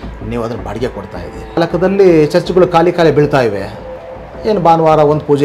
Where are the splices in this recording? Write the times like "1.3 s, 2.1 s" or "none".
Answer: 1.6 s